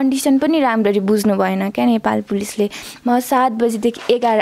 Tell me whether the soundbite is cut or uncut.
cut